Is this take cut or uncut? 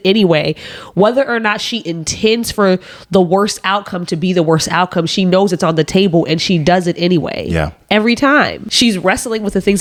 uncut